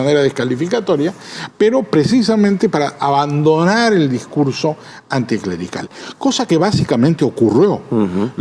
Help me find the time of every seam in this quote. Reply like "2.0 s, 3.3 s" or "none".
none